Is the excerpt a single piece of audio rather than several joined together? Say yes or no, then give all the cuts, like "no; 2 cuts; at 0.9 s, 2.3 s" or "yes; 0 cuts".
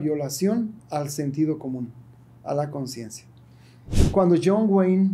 no; 1 cut; at 4.1 s